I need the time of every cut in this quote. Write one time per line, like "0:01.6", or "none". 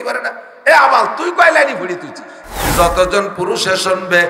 0:02.6